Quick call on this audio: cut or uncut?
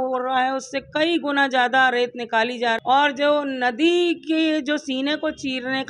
cut